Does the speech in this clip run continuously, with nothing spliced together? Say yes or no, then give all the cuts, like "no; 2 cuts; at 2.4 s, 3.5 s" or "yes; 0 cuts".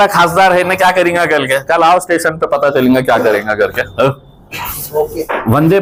yes; 0 cuts